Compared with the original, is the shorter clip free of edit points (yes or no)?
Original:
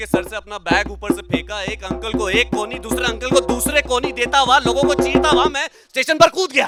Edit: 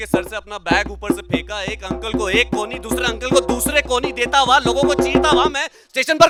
yes